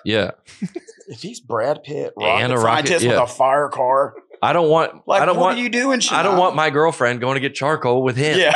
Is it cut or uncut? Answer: uncut